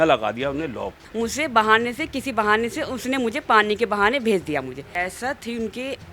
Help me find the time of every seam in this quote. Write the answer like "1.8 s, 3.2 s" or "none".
1.0 s, 4.9 s